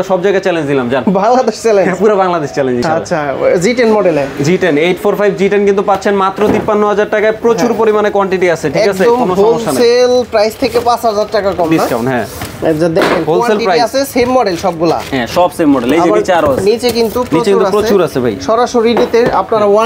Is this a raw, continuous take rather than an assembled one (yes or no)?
yes